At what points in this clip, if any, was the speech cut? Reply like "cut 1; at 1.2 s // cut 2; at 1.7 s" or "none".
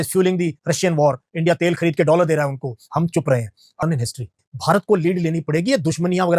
cut 1; at 3.8 s